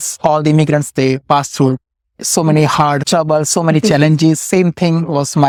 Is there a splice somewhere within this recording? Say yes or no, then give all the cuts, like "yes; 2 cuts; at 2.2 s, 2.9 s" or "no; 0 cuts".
no; 0 cuts